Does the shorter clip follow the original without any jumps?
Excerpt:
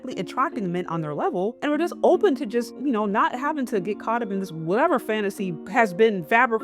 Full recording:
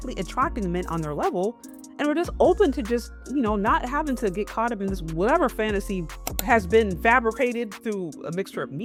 no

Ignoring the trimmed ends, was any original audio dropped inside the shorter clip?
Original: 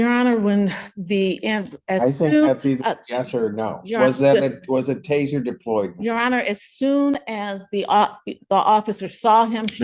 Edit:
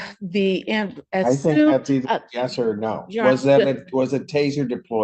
no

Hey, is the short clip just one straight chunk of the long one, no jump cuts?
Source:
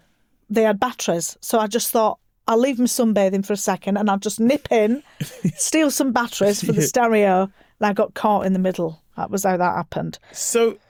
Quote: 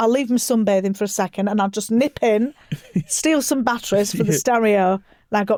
yes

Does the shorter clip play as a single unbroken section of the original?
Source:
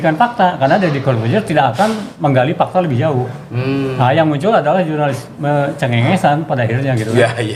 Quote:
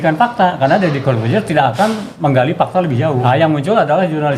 no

